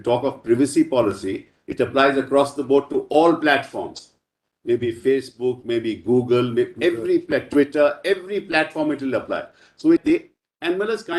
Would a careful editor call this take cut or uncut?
cut